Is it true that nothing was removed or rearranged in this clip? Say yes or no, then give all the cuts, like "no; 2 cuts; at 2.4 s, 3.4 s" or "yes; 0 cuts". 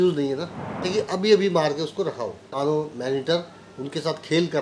no; 2 cuts; at 0.8 s, 2.5 s